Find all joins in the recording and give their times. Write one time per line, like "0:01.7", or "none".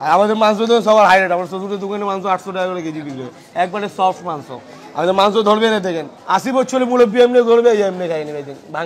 0:06.1